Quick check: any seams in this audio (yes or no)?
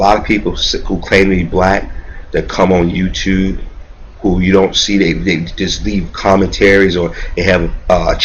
yes